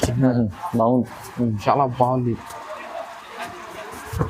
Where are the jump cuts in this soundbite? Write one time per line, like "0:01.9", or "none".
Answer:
none